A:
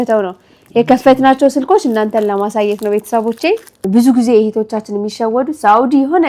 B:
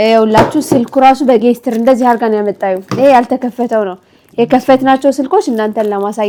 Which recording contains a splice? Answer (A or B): A